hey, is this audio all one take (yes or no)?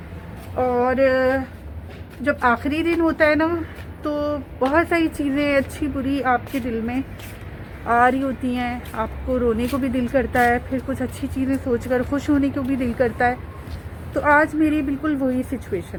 yes